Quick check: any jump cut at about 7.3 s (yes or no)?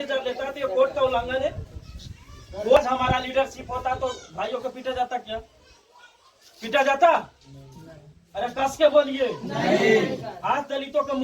no